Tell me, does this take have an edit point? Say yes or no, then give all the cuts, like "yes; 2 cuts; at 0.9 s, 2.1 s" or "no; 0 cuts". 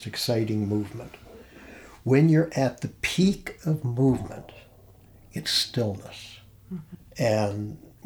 no; 0 cuts